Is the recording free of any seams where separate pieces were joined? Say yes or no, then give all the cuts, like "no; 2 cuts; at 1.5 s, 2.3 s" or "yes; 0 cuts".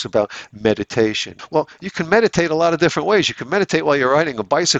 no; 1 cut; at 1.3 s